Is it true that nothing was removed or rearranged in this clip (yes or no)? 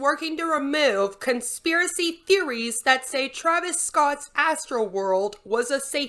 yes